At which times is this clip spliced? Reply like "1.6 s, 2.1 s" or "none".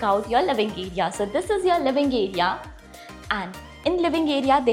none